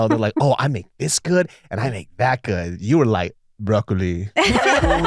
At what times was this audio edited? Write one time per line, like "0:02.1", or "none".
none